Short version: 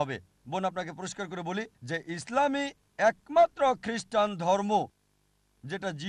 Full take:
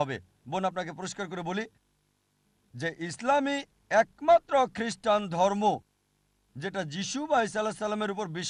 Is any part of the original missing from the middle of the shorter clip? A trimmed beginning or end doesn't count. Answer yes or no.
yes